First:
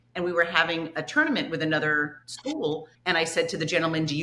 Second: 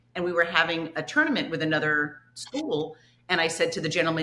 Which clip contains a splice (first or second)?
first